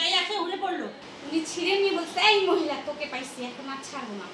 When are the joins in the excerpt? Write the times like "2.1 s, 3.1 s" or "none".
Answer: 1.0 s